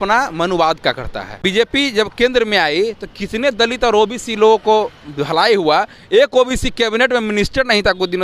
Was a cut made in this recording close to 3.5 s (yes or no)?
no